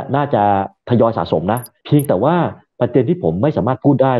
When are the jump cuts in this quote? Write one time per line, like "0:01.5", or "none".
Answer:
0:01.7